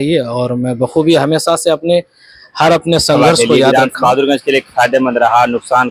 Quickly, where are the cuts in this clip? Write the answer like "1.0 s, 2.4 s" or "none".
3.7 s

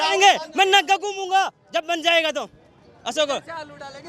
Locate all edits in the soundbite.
none

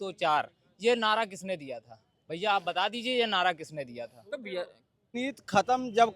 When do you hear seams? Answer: 5.2 s

